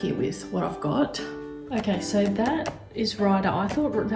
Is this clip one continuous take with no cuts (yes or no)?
no